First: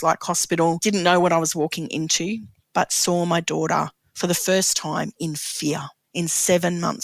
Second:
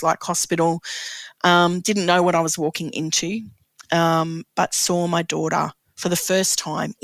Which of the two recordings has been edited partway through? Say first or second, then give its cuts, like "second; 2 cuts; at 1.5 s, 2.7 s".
first; 3 cuts; at 0.8 s, 2.6 s, 6.0 s